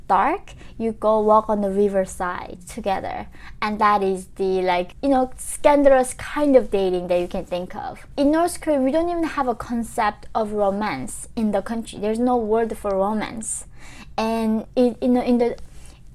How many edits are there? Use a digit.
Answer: 1